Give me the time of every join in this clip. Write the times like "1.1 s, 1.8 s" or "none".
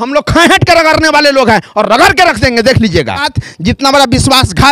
3.4 s

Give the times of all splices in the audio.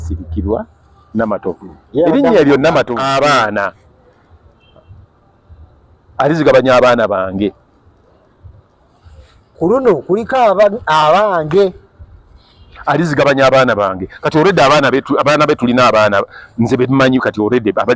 3.0 s

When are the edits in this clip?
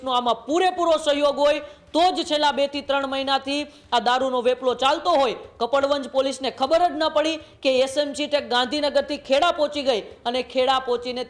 none

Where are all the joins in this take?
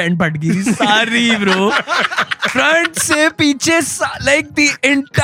none

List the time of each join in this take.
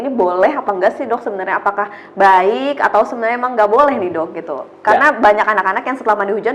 none

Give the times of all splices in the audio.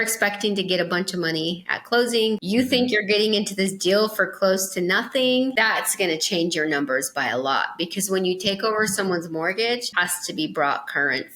2.4 s, 5.5 s, 9.9 s

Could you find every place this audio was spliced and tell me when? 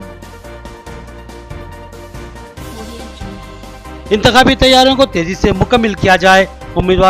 1.0 s

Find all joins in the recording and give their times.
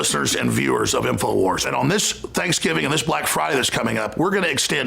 1.6 s

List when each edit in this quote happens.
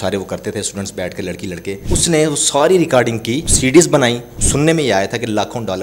1.8 s, 3.5 s, 4.3 s

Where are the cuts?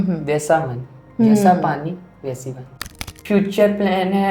3.0 s

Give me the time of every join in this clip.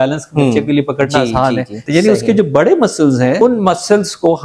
1.8 s, 3.4 s

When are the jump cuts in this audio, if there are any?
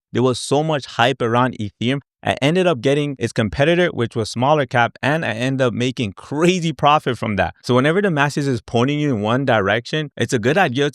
3.2 s

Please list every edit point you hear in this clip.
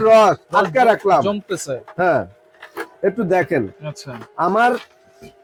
none

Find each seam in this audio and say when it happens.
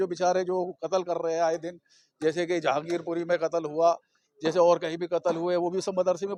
none

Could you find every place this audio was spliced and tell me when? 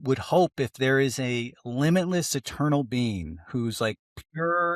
none

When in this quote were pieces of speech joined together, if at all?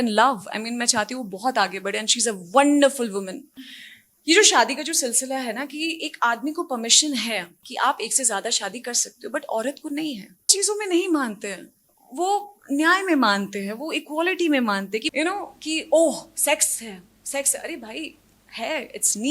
3.4 s, 10.5 s, 15.1 s

